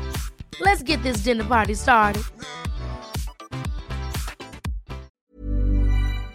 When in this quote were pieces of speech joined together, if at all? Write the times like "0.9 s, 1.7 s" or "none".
5.2 s